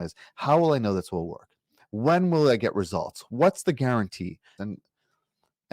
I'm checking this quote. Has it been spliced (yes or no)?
yes